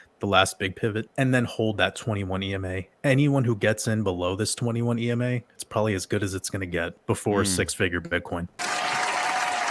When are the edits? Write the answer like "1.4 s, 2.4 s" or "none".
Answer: 1.1 s, 7.0 s, 8.5 s